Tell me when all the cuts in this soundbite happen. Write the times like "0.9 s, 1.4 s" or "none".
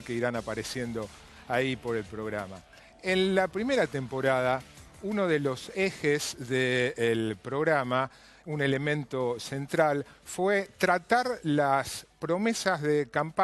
7.1 s